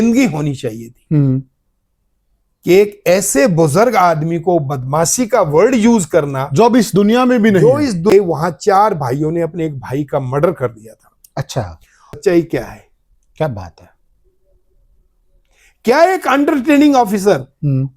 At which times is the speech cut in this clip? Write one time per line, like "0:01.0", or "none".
0:08.1
0:12.2